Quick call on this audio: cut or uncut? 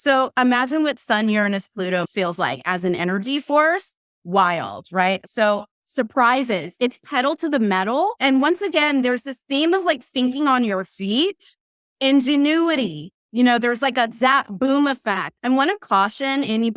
cut